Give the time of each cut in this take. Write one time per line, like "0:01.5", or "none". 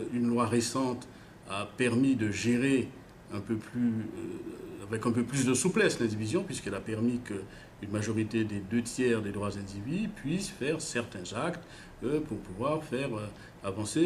0:05.7